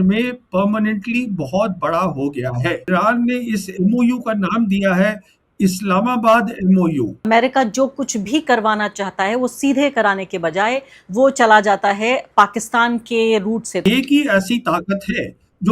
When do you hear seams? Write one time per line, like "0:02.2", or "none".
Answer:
0:02.9
0:07.3
0:13.8